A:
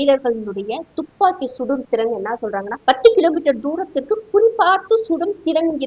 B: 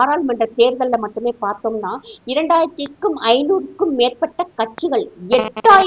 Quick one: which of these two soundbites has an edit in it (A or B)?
A